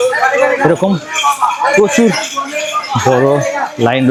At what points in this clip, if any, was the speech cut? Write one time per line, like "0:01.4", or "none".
none